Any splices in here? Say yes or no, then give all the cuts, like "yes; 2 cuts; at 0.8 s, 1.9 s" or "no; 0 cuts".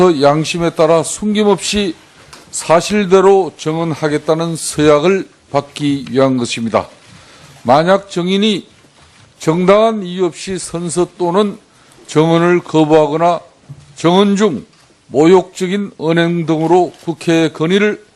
no; 0 cuts